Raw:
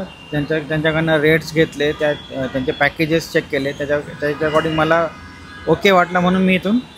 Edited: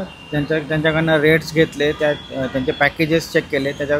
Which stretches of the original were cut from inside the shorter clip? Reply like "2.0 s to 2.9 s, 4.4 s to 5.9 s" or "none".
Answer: none